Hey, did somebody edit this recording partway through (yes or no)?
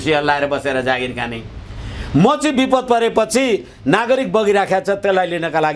no